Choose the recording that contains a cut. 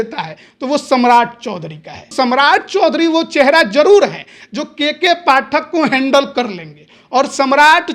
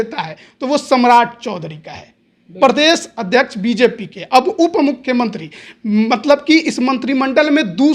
first; 1 cut; at 2.1 s

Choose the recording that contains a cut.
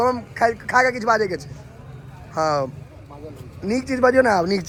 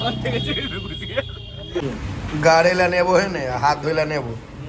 second; 1 cut; at 1.8 s

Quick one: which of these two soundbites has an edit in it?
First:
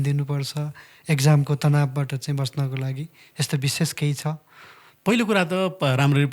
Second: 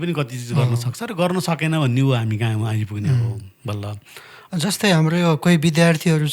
second; 1 cut; at 4.4 s

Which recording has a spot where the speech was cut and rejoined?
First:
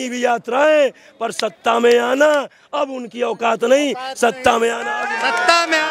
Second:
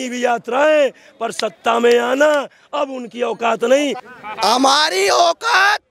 second; 1 cut; at 4.1 s

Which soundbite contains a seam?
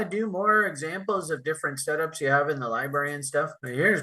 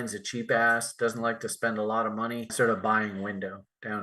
second; 1 cut; at 2.5 s

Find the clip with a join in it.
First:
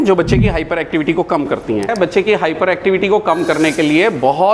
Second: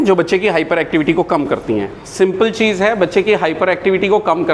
first; 1 cut; at 1.9 s

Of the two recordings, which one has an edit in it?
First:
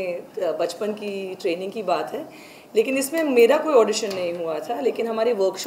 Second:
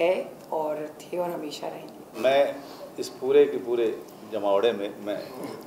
second; 1 cut; at 2.0 s

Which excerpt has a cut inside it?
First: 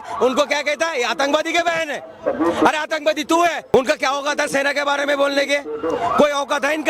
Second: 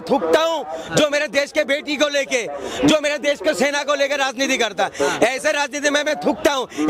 first; 1 cut; at 3.6 s

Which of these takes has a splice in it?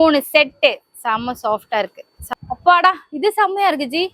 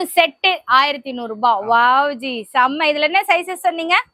first; 1 cut; at 2.2 s

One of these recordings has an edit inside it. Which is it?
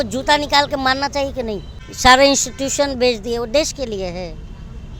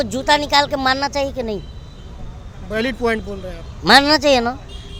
first; 1 cut; at 1.8 s

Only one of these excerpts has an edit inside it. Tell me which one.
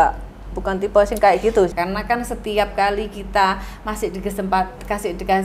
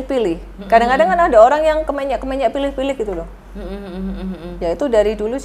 first; 1 cut; at 1.7 s

